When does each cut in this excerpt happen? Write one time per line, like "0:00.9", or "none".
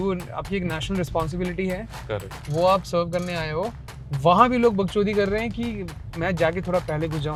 none